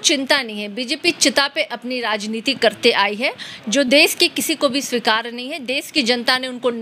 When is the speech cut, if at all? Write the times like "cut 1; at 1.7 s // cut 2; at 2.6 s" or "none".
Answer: none